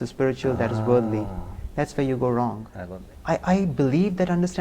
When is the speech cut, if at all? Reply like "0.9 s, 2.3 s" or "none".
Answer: 2.7 s

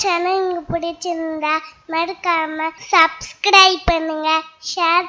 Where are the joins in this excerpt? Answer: 2.8 s

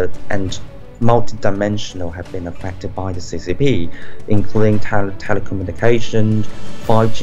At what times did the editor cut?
none

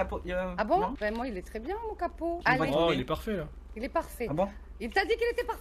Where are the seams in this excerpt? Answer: 2.4 s

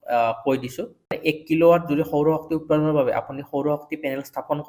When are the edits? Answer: 1.0 s

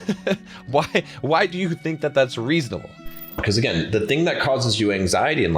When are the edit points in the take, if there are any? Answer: 3.3 s

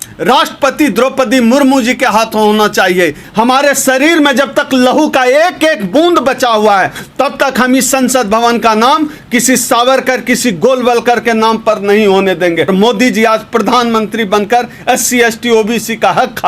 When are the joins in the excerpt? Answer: 3.2 s, 12.7 s

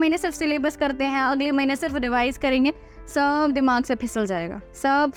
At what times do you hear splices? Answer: none

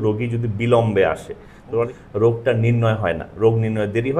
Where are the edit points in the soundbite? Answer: 1.9 s

